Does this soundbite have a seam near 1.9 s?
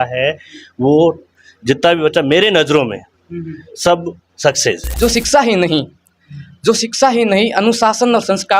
no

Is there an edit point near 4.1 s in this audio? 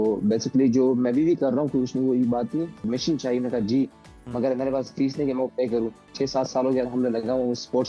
no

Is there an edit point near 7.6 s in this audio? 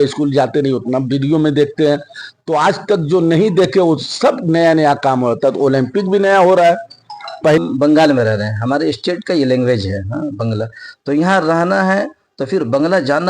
yes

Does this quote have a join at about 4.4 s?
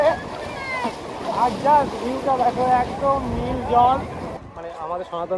yes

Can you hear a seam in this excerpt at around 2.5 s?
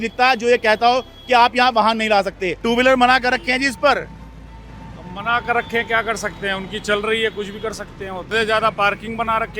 yes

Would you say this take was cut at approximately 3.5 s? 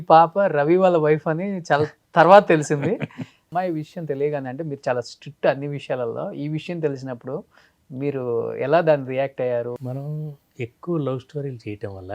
yes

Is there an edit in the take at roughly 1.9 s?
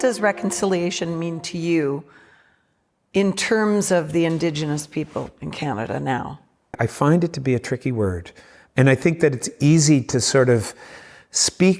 no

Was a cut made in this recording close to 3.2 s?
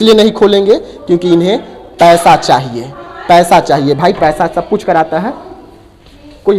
no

